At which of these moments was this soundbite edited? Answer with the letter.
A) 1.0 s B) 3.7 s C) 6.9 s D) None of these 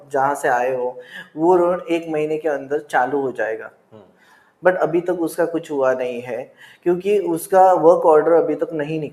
D